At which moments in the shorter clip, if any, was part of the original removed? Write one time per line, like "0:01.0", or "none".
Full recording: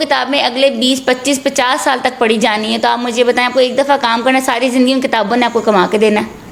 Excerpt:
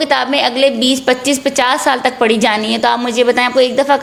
none